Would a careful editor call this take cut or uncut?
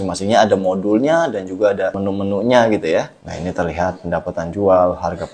cut